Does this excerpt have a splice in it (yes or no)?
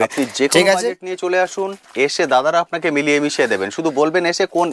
no